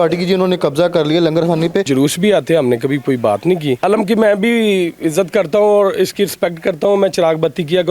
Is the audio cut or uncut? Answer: cut